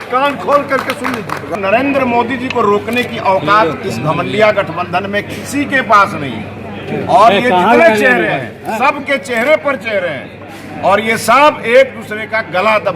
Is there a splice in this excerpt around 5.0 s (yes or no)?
no